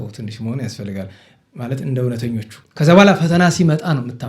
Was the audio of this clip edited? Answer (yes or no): yes